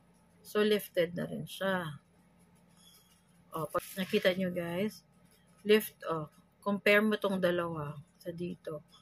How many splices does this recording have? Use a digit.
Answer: 1